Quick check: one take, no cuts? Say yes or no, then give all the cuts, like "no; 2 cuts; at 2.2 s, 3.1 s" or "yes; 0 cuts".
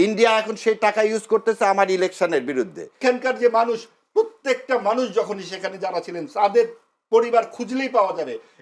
no; 1 cut; at 3.0 s